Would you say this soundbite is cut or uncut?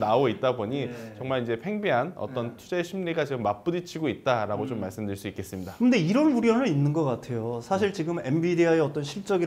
uncut